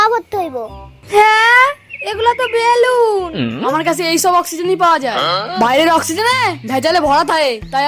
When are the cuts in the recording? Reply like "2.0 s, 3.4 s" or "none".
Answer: 3.6 s